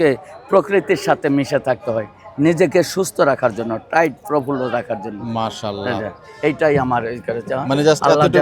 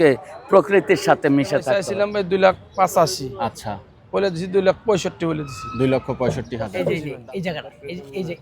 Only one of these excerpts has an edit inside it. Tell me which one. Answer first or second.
second